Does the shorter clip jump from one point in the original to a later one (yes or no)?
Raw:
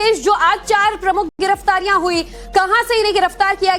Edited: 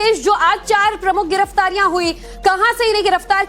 yes